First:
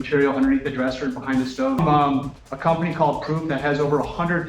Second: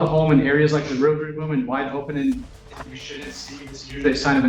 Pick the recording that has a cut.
first; 1 cut; at 1.8 s

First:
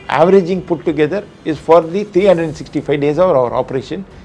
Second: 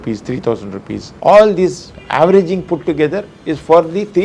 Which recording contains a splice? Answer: second; 1 cut; at 1.0 s

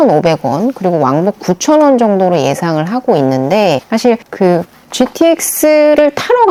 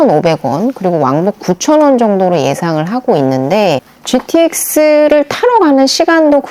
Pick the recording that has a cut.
second; 1 cut; at 3.8 s

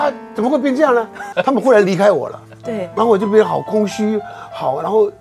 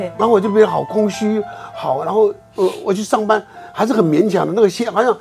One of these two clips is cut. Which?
first; 1 cut; at 1.3 s

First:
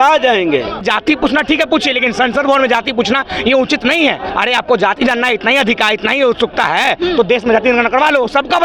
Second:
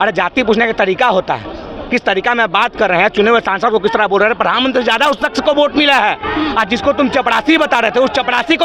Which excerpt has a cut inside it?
first; 2 cuts; at 0.8 s, 4.3 s

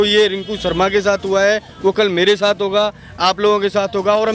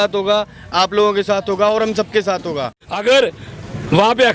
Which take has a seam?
second; 1 cut; at 2.8 s

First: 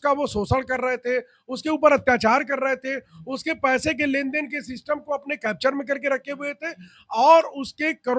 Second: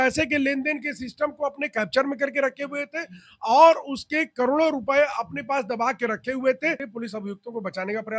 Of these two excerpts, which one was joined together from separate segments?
second; 1 cut; at 6.9 s

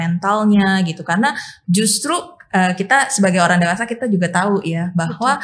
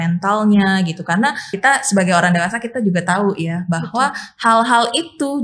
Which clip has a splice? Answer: second; 1 cut; at 1.5 s

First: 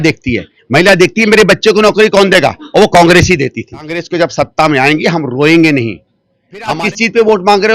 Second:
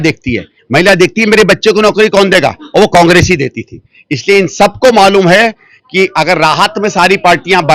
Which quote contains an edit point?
first; 2 cuts; at 4.0 s, 6.7 s

